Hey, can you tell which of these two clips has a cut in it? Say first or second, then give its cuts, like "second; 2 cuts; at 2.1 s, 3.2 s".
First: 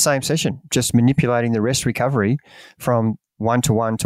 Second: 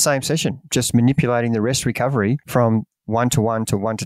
second; 1 cut; at 2.4 s